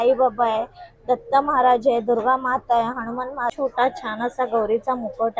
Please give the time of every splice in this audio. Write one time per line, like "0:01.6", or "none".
0:03.5